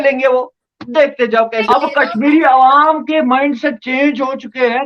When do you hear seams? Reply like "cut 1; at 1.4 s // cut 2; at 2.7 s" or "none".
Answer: cut 1; at 1.7 s

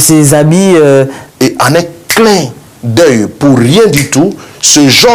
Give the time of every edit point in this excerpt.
cut 1; at 1.2 s

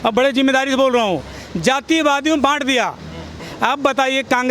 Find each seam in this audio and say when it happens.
cut 1; at 3.4 s

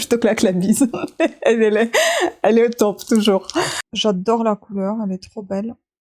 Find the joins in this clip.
cut 1; at 3.8 s

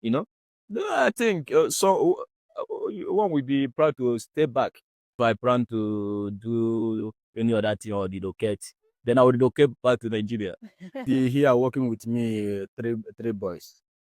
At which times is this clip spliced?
cut 1; at 5.2 s // cut 2; at 11.0 s

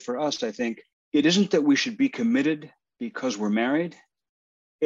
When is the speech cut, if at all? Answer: cut 1; at 0.9 s

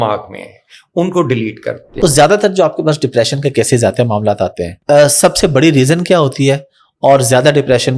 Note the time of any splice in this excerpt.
cut 1; at 1.8 s // cut 2; at 4.7 s

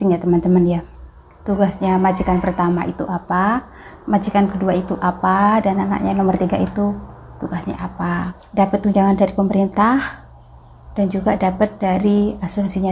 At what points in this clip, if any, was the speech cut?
cut 1; at 8.4 s

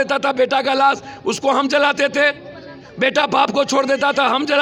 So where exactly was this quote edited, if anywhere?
none

